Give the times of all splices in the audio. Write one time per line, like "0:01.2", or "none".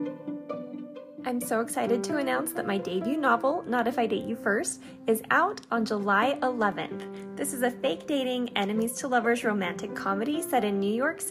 none